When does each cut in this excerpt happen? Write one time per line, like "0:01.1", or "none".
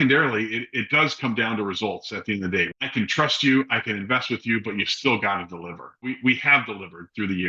0:02.7
0:06.2